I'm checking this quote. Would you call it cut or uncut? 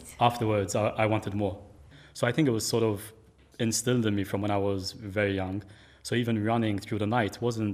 cut